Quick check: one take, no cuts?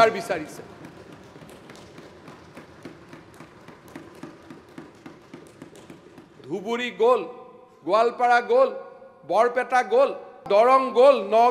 no; 1 cut; at 10.4 s

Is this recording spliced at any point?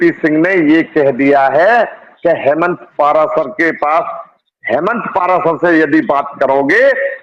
no; 0 cuts

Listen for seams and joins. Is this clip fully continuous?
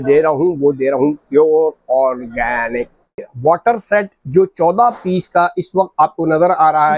no; 1 cut; at 3.2 s

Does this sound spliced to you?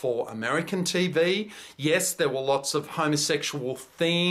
no; 0 cuts

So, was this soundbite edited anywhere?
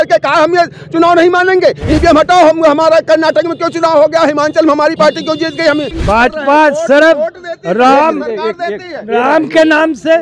yes; 1 cut; at 5.9 s

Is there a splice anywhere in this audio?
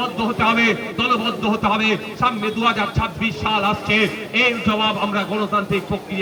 no; 0 cuts

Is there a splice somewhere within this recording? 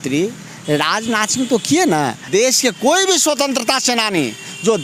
yes; 1 cut; at 2.2 s

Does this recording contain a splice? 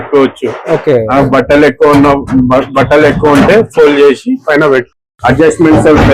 yes; 1 cut; at 4.9 s

